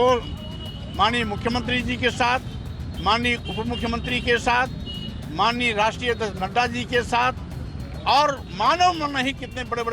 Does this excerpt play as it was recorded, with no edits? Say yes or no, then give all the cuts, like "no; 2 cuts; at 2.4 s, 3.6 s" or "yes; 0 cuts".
yes; 0 cuts